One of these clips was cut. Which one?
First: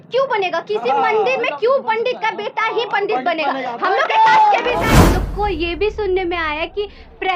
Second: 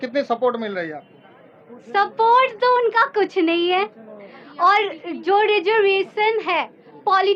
first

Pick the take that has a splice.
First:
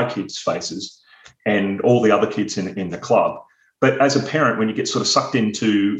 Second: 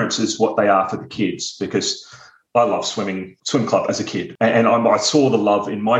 second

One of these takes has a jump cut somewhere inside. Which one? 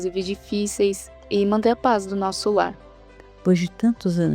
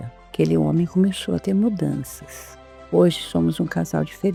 first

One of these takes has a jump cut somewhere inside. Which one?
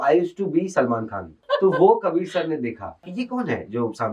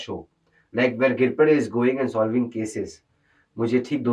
first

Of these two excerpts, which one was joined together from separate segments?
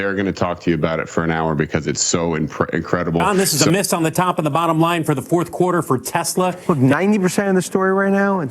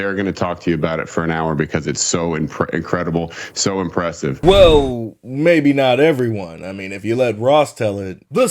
first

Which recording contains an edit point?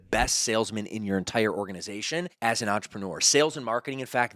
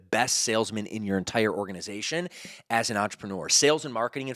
first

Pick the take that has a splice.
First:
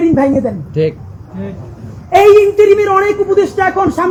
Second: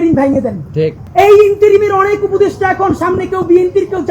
second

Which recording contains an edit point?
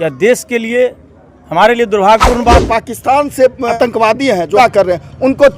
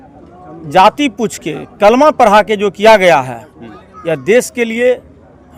first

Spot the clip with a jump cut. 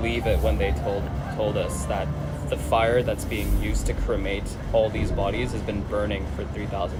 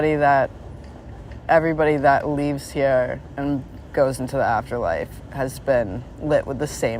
second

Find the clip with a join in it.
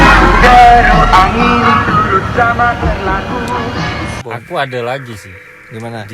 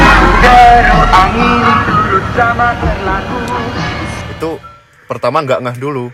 first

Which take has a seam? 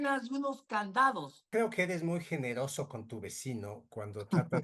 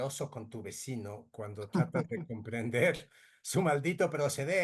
first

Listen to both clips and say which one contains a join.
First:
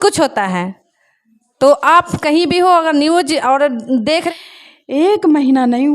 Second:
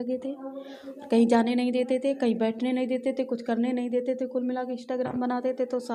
first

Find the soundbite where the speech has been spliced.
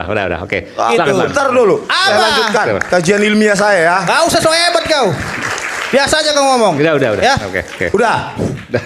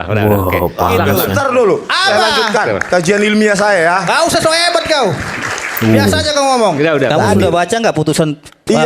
second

